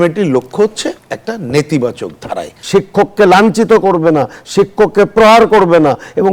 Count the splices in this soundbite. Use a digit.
1